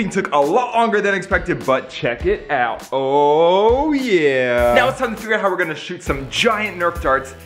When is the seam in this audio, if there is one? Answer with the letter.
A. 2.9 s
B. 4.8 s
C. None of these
B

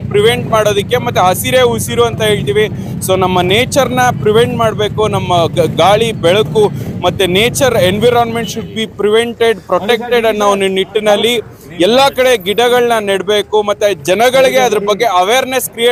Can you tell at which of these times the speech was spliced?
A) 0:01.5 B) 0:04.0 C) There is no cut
C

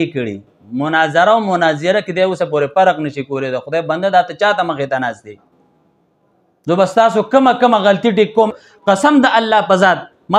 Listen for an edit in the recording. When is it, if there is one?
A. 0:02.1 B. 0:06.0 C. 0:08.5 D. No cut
C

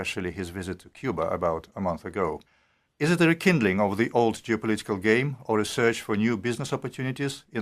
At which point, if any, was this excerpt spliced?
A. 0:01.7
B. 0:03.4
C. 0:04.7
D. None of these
D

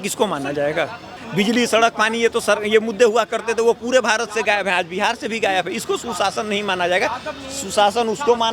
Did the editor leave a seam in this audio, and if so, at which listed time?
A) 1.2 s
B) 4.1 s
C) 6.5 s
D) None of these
A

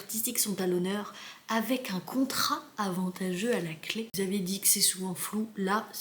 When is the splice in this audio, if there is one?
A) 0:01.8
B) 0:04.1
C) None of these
B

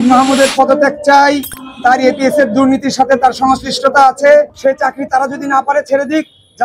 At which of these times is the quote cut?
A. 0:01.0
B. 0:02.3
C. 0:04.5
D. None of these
C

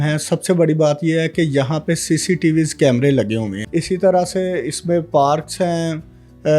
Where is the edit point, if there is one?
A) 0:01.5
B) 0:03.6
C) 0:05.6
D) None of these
B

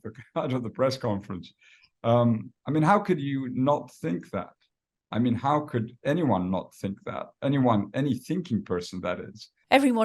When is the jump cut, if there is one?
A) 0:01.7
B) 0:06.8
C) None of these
C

